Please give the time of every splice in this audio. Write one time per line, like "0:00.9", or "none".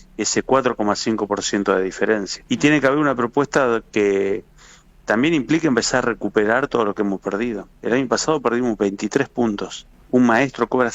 0:02.3
0:09.9